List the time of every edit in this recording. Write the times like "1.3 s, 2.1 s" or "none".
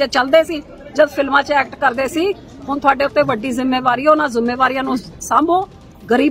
none